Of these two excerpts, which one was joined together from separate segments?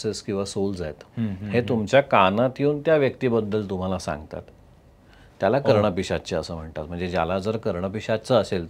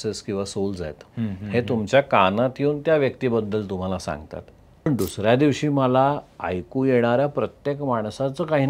second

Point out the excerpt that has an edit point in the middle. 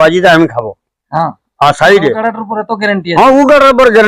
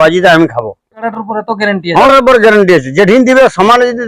second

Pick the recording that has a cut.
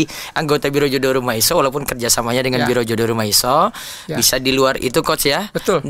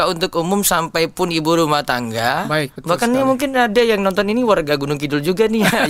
second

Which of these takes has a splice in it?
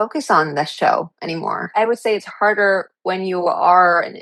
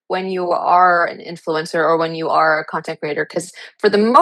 first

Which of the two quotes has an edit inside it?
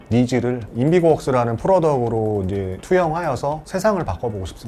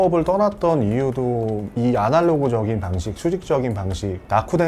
second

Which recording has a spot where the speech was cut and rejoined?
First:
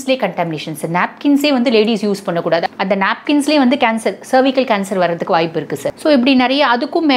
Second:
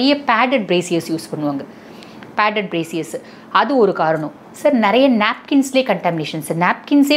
first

